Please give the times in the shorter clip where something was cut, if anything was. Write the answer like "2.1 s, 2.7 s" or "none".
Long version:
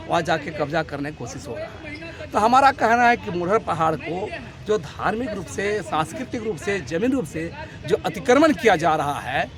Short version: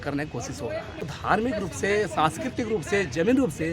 1.2 s